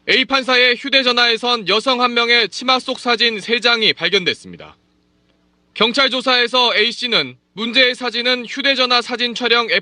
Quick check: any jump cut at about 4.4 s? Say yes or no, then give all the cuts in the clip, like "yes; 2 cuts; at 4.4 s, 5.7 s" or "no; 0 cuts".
no; 1 cut; at 5.9 s